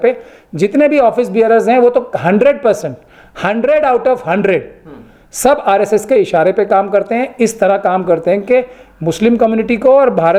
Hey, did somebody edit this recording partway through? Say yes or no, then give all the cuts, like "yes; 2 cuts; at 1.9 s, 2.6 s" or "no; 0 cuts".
no; 0 cuts